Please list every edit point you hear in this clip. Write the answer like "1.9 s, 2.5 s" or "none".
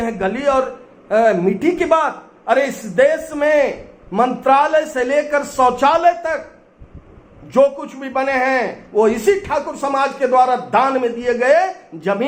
none